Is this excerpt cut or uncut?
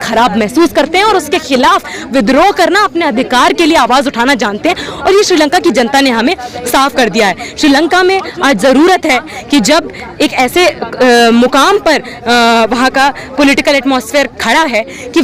uncut